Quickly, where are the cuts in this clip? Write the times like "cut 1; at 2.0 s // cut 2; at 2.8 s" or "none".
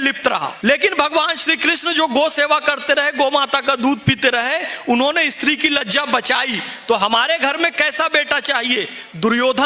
none